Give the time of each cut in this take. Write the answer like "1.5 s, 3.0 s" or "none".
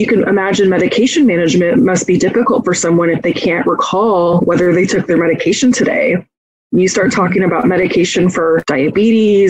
4.3 s, 8.7 s